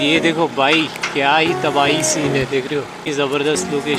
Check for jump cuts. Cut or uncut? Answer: cut